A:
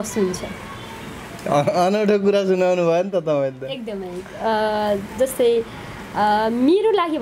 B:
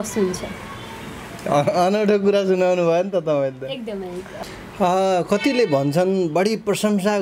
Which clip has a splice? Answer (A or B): B